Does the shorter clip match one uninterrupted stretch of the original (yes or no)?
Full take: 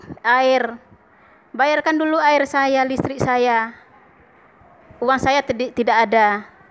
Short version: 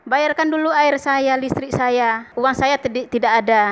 no